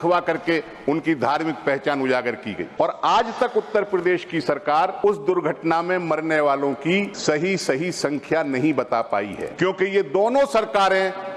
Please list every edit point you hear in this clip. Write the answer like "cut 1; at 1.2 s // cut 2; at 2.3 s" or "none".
cut 1; at 2.6 s // cut 2; at 5.0 s // cut 3; at 7.1 s // cut 4; at 9.4 s